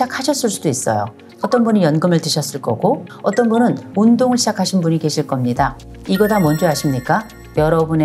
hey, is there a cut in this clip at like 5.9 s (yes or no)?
yes